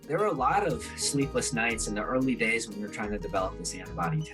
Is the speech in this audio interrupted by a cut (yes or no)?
no